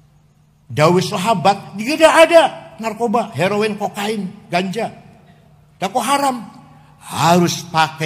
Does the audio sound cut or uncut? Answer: uncut